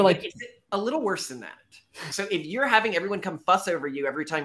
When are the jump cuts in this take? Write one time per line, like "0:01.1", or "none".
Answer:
0:02.1